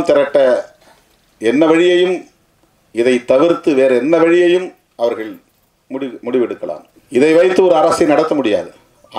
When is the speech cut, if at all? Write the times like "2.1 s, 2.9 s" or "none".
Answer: 6.9 s